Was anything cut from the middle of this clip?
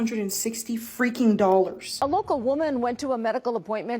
yes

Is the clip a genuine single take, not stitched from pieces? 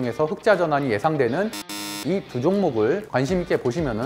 no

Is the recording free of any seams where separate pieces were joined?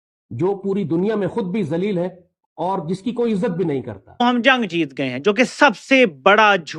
no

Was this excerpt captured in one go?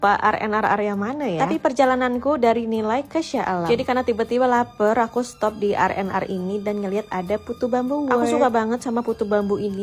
yes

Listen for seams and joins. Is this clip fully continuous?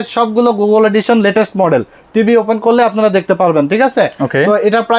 yes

